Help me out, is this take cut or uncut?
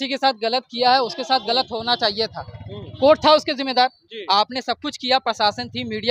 uncut